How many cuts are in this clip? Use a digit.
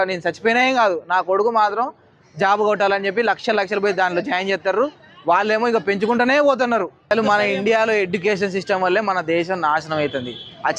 1